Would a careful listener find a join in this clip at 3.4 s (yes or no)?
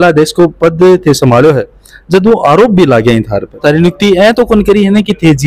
yes